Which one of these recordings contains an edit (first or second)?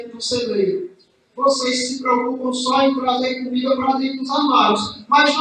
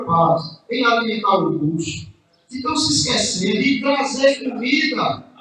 second